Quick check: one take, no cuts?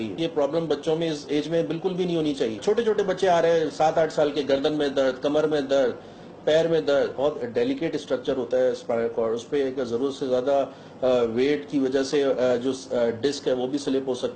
yes; 0 cuts

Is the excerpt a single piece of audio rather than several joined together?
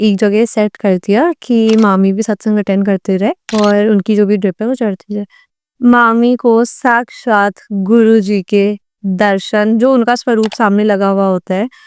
yes; 0 cuts

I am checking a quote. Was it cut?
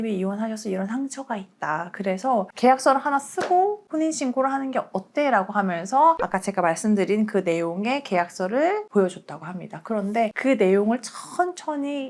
no; 0 cuts

